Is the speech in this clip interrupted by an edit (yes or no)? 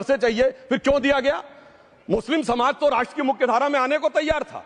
no